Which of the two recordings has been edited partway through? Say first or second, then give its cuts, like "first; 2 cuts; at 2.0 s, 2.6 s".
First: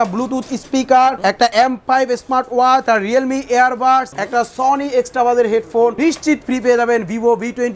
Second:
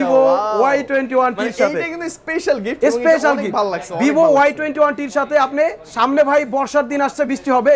first; 4 cuts; at 1.4 s, 2.8 s, 4.2 s, 5.9 s